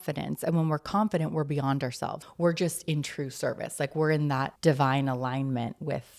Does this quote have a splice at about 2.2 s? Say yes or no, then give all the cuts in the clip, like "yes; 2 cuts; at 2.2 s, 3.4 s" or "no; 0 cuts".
yes; 2 cuts; at 2.2 s, 4.5 s